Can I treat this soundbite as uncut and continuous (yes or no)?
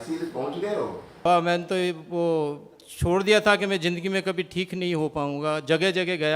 no